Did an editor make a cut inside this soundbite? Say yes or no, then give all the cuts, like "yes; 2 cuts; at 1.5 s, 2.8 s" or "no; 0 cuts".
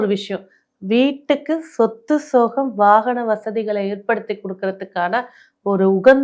no; 0 cuts